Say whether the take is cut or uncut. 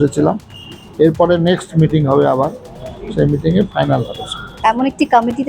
cut